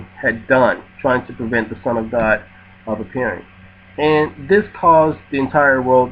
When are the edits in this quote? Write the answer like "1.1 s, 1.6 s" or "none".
none